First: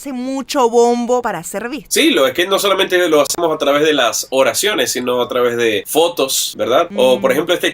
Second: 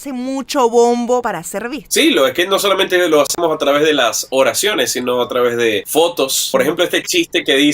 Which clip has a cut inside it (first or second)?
second